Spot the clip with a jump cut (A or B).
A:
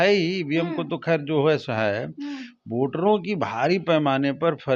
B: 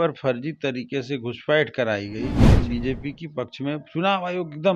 B